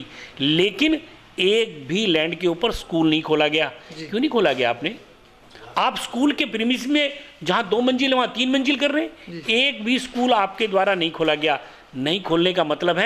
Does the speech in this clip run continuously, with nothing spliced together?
yes; 0 cuts

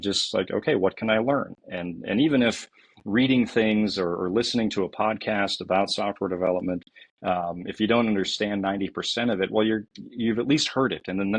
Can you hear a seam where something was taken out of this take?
no; 0 cuts

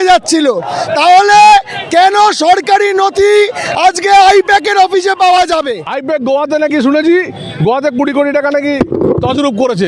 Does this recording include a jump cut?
yes; 1 cut; at 5.8 s

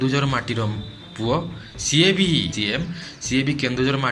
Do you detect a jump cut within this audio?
yes; 1 cut; at 2.5 s

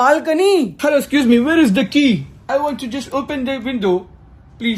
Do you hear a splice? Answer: no; 0 cuts

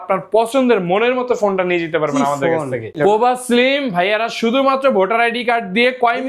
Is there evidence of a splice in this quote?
yes; 1 cut; at 3.0 s

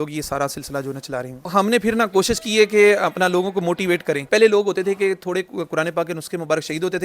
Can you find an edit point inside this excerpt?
yes; 2 cuts; at 1.5 s, 4.2 s

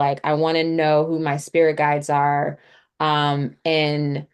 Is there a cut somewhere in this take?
no; 0 cuts

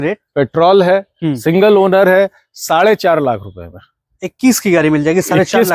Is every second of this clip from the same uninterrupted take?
yes; 0 cuts

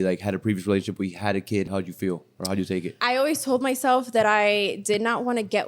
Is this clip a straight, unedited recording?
no; 2 cuts; at 1.7 s, 2.9 s

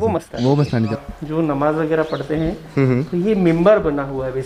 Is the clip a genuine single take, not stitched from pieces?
no; 1 cut; at 1.0 s

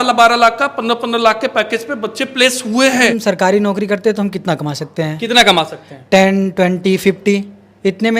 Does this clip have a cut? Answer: yes; 1 cut; at 3.1 s

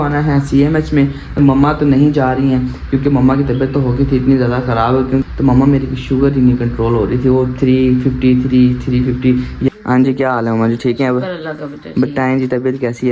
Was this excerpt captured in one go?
no; 3 cuts; at 1.4 s, 5.2 s, 9.7 s

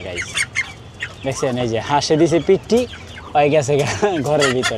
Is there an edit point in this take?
no; 0 cuts

